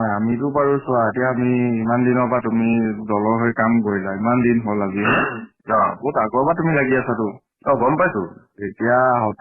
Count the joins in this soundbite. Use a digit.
1